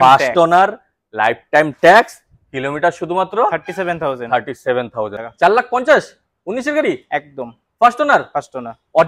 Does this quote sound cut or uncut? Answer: cut